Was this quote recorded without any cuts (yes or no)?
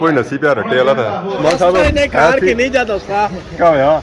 no